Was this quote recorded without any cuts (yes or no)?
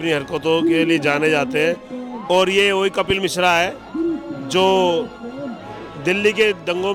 yes